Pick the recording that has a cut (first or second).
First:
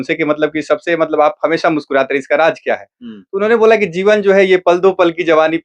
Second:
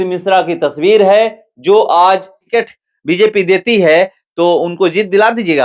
second